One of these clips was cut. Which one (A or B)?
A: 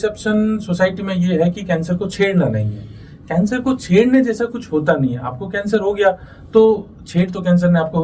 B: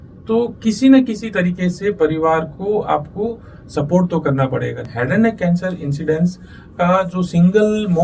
B